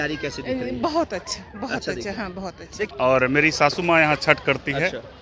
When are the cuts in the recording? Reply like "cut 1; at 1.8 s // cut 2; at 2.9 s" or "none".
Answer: cut 1; at 2.9 s